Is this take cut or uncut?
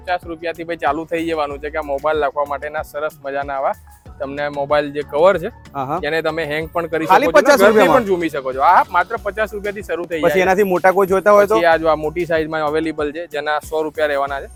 uncut